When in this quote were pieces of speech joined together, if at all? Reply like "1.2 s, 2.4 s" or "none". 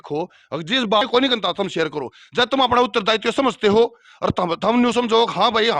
1.0 s

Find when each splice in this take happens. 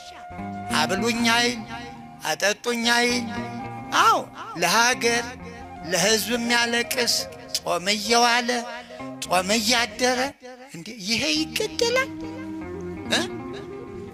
none

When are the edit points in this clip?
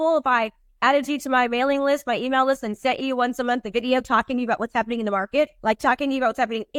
5.5 s

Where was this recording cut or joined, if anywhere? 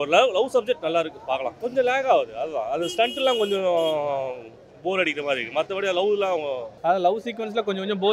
1.6 s, 6.7 s

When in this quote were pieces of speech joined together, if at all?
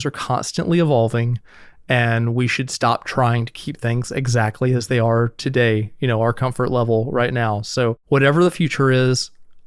8.0 s

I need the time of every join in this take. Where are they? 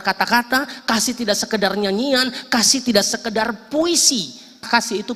none

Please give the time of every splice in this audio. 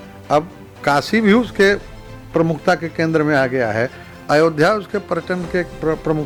none

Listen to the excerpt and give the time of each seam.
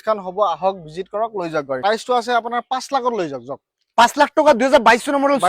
1.8 s

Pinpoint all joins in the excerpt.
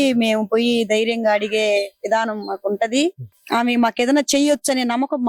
3.3 s

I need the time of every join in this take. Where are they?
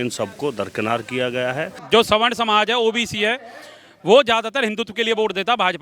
1.8 s

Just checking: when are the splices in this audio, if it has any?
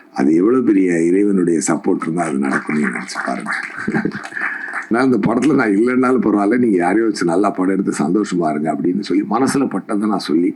4.9 s

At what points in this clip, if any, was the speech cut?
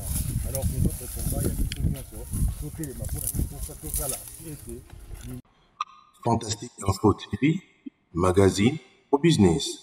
5.4 s

